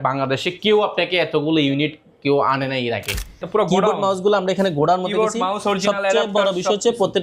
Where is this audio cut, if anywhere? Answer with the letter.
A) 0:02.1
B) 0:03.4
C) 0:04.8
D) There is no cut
B